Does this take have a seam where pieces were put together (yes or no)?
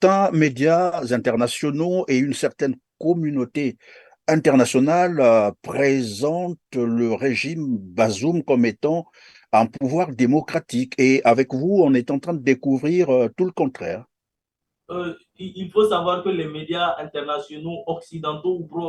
no